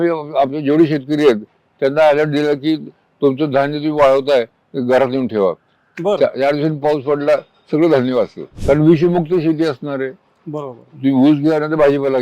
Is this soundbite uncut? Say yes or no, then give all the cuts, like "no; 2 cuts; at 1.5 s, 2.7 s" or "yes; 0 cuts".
no; 1 cut; at 8.5 s